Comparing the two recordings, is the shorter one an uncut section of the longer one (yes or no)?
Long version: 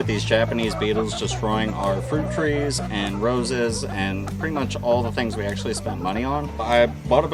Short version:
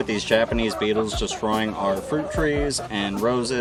yes